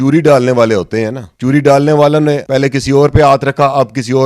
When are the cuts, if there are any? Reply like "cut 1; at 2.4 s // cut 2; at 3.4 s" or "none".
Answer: cut 1; at 1.2 s // cut 2; at 2.4 s